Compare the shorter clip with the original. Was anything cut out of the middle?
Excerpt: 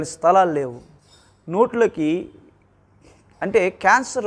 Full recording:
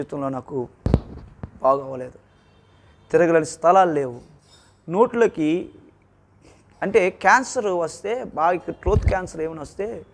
no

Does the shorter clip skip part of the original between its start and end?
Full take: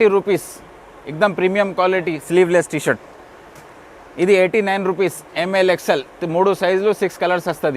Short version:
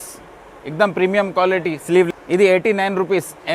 yes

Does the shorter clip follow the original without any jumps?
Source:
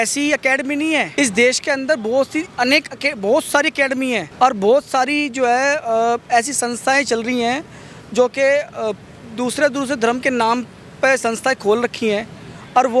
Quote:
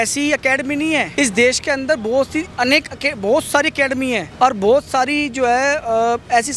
yes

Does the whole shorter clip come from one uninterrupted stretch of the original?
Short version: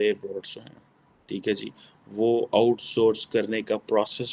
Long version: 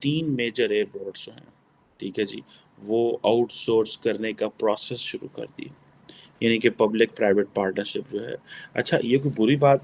yes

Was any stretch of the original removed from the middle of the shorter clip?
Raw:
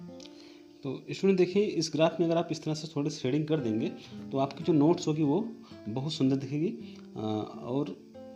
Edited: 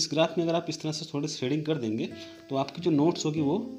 no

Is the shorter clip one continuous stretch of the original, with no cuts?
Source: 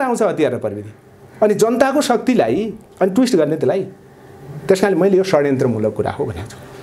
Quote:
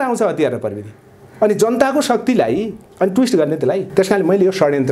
no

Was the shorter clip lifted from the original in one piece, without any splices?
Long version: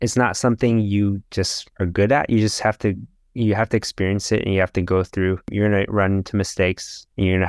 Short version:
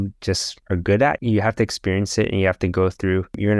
no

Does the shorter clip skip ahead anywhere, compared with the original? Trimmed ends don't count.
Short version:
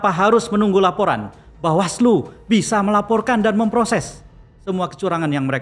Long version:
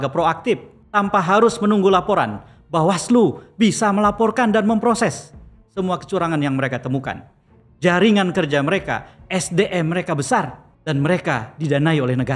no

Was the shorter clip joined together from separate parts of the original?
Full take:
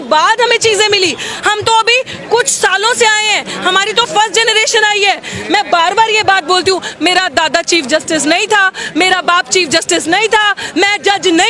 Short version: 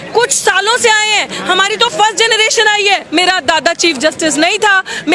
yes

